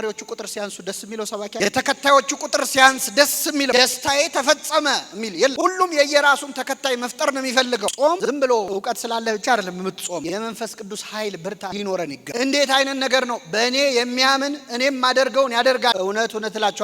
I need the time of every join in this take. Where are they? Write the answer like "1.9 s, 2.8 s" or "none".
7.9 s, 12.3 s